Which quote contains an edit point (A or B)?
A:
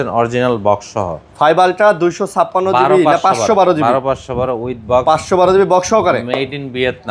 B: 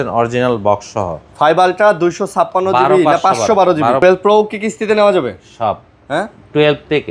B